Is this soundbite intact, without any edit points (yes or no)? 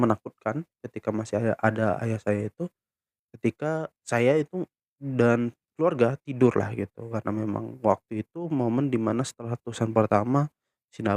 yes